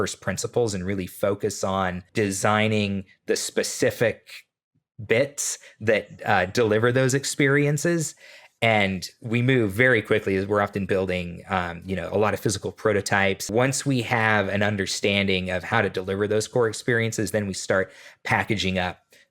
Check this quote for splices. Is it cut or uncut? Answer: cut